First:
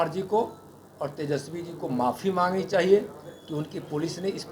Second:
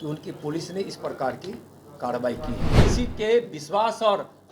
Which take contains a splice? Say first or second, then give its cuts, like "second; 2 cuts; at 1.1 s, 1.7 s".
second; 1 cut; at 2.8 s